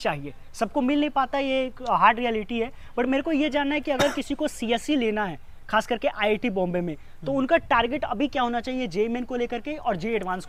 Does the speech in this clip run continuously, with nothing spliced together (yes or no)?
yes